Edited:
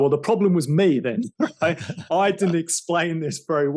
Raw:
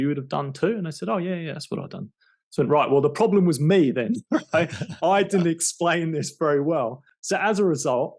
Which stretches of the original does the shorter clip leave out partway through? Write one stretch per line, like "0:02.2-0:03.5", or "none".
none